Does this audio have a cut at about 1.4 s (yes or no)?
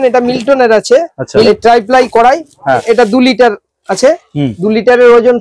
yes